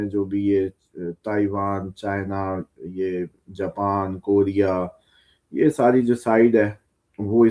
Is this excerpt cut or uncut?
uncut